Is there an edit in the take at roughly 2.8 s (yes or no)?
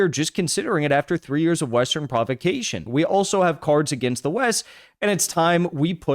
yes